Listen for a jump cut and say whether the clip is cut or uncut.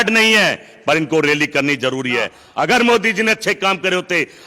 cut